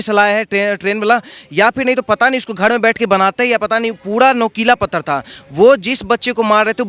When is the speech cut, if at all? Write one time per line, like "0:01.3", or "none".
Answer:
none